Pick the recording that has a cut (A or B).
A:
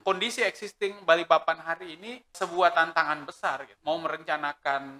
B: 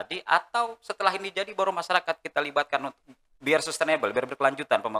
A